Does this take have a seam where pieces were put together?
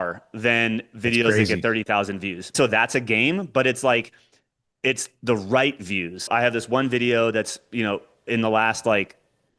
yes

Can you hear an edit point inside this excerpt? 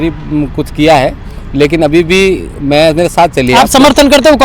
no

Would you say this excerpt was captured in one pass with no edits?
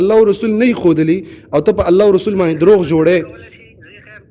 yes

